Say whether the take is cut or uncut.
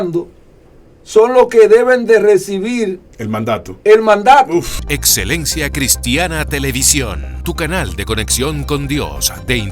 cut